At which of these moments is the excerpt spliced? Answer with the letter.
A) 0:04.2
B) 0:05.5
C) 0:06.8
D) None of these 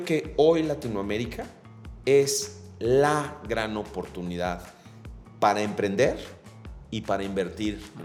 D